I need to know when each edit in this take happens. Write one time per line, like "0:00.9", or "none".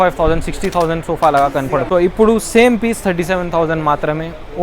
0:01.8